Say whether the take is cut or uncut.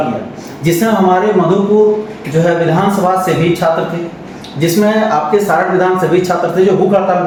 uncut